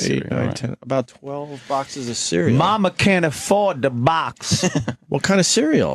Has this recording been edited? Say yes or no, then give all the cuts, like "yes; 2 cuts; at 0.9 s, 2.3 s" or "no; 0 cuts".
yes; 1 cut; at 5.0 s